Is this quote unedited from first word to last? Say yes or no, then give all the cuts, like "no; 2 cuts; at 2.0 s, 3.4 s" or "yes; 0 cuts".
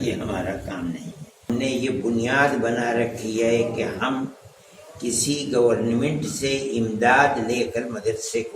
no; 1 cut; at 1.5 s